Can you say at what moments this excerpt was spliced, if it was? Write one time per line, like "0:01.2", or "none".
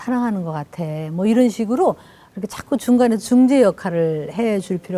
none

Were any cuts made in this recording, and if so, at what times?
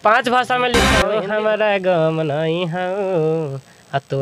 0:00.9

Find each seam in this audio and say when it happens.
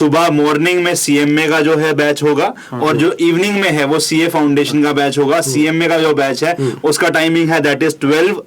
none

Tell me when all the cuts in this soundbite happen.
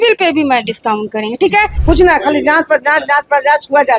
0:01.6

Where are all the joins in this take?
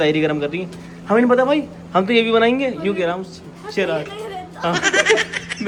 none

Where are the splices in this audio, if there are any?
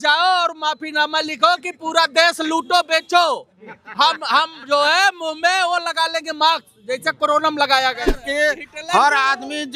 0:08.1

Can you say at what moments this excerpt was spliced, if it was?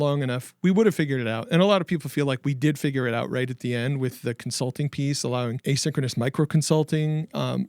0:05.6

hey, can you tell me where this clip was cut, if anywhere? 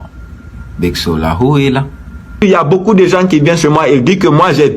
0:02.4

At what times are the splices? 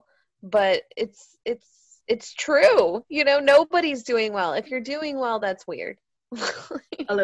0:06.1

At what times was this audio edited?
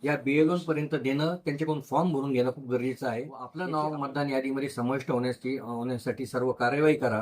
0:03.4

